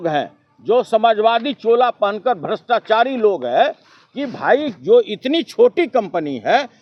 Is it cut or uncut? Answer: uncut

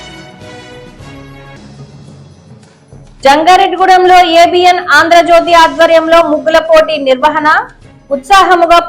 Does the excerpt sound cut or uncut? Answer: cut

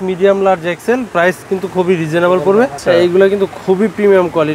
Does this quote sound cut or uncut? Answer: cut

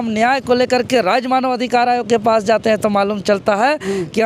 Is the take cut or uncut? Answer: uncut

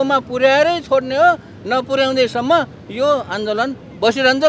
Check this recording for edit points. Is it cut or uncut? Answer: uncut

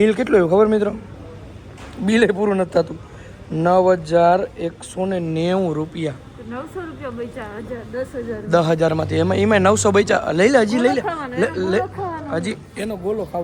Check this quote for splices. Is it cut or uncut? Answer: cut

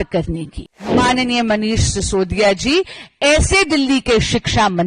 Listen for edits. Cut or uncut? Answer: cut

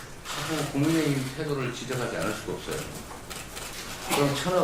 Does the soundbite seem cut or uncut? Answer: cut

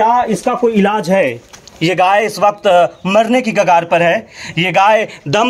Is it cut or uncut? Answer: uncut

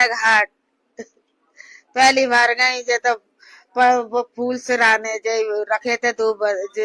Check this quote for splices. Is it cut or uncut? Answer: uncut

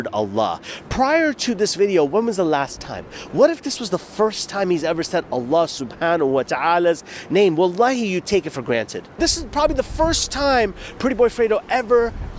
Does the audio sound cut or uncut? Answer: cut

